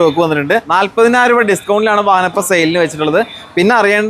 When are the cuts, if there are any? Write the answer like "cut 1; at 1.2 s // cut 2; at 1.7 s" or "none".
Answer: cut 1; at 0.9 s